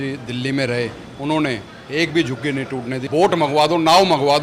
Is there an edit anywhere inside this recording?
yes; 1 cut; at 3.0 s

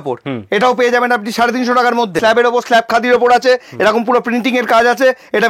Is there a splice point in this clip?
yes; 1 cut; at 2.2 s

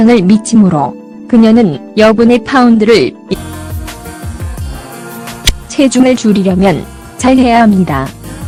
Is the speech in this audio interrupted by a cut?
no; 0 cuts

